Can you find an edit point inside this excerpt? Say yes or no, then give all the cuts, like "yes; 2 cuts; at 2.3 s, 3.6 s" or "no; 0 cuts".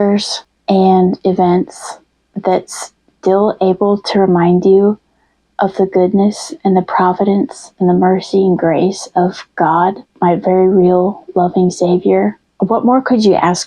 yes; 2 cuts; at 10.1 s, 12.4 s